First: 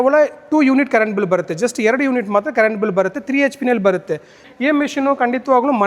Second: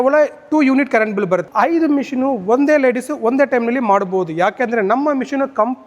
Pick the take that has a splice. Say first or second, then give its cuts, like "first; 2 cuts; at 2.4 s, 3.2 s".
second; 1 cut; at 1.5 s